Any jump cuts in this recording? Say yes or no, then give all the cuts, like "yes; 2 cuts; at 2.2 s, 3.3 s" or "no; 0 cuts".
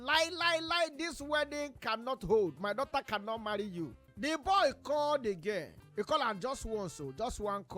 yes; 2 cuts; at 4.0 s, 5.8 s